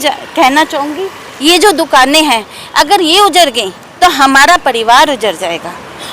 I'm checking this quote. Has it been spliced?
no; 0 cuts

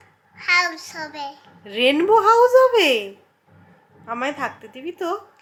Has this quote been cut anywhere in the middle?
no; 0 cuts

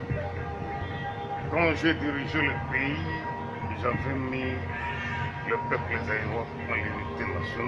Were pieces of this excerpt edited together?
no; 0 cuts

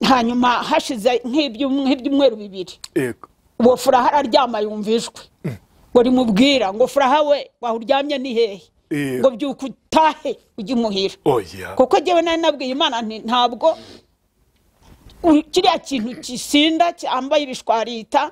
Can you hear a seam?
no; 0 cuts

